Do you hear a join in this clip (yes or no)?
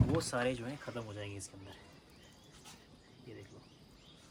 no